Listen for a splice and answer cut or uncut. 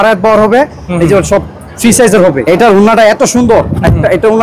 cut